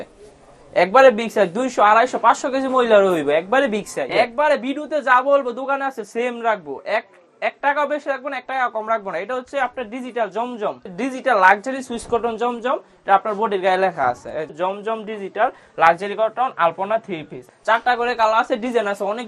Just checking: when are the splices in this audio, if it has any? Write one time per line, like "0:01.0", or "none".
0:04.1
0:10.8
0:14.5
0:17.4